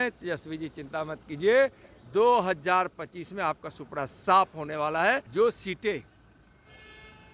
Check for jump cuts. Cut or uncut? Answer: cut